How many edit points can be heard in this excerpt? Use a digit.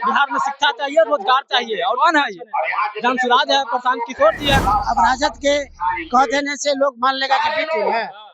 1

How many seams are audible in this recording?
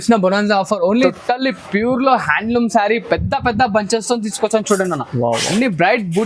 1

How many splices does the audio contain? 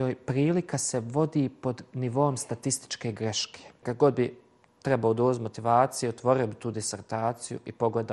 1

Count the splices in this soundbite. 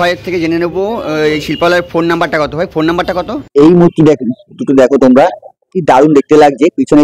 1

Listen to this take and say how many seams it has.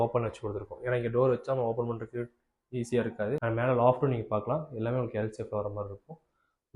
1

